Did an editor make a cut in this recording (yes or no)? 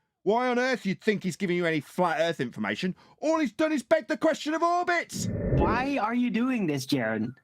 yes